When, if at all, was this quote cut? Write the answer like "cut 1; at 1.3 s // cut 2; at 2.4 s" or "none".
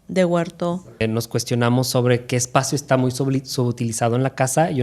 cut 1; at 1.0 s

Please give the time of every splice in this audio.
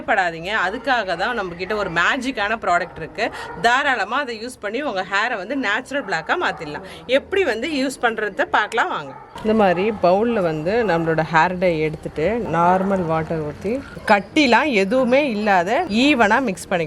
none

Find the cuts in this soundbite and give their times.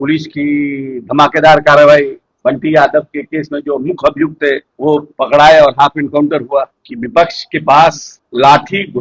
cut 1; at 6.8 s

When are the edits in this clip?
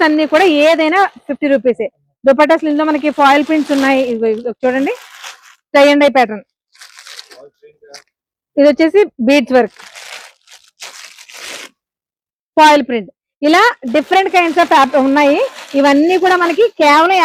none

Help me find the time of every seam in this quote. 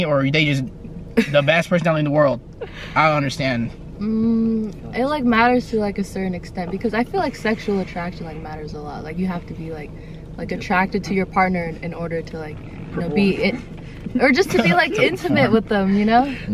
none

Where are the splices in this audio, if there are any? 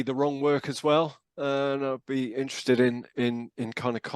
none

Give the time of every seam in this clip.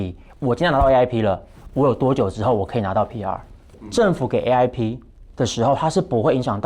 cut 1; at 3.8 s

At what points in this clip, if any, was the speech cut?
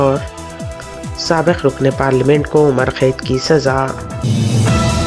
cut 1; at 4.1 s

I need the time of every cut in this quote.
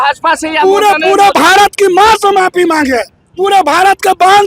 none

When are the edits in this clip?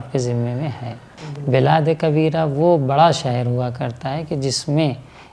cut 1; at 1.1 s

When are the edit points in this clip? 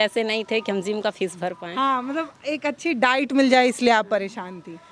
none

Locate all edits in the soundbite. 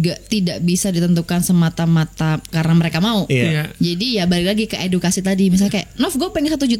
none

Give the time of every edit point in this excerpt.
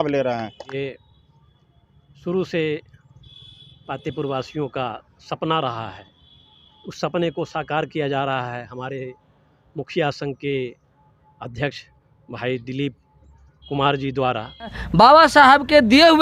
cut 1; at 0.7 s // cut 2; at 14.8 s

